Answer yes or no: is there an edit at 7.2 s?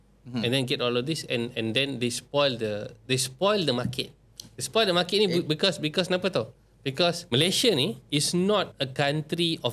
yes